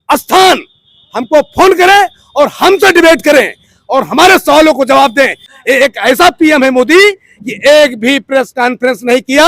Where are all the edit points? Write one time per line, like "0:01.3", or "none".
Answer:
0:05.5